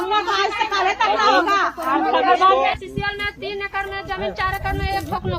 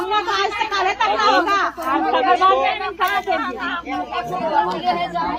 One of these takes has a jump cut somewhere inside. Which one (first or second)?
first